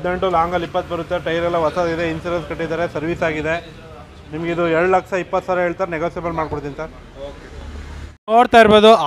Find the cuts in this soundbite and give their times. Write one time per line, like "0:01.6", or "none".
none